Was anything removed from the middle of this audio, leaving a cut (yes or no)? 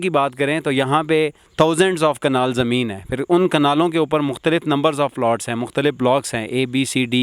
no